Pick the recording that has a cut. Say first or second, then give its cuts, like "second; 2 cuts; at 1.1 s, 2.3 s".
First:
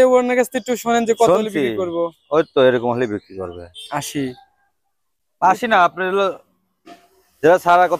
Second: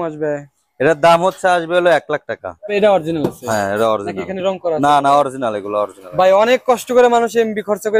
second; 1 cut; at 2.7 s